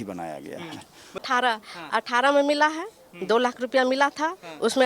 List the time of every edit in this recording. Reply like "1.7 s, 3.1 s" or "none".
1.2 s